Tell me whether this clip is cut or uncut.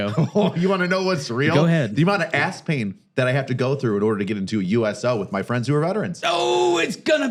uncut